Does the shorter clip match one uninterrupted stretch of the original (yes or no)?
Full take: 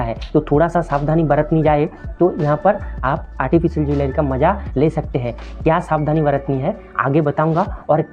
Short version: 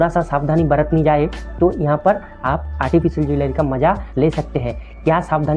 yes